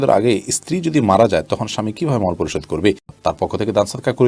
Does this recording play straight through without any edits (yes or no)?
yes